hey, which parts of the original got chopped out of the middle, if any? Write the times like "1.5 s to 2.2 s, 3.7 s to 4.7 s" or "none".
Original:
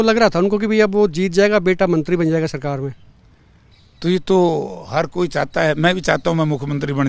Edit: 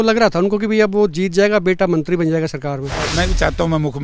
3.1 s to 5.8 s

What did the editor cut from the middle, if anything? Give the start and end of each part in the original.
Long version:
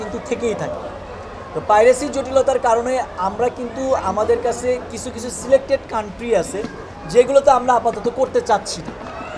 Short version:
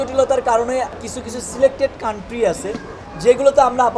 3.1 s to 4.9 s

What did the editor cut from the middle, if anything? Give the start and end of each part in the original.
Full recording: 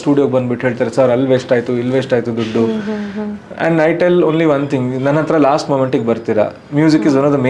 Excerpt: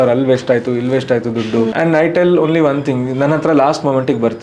2.7 s to 3.6 s

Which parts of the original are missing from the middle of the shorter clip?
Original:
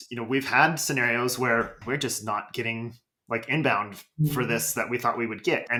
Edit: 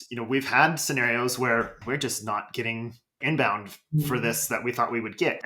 3.2 s to 3.4 s

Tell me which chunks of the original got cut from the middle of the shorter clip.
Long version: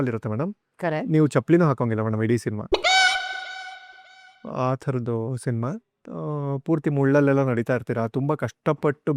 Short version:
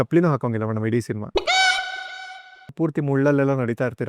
4.1 s to 6.6 s

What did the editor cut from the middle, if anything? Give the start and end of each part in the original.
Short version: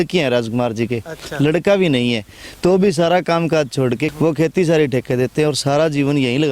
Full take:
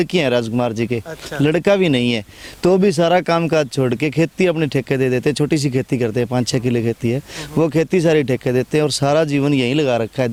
4.1 s to 7.4 s

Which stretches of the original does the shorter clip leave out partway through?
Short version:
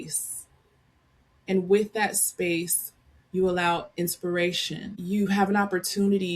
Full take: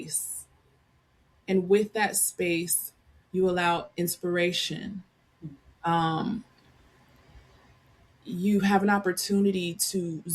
4.9 s to 8.2 s

